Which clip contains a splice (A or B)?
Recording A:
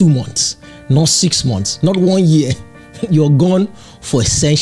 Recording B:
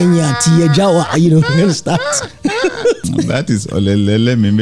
B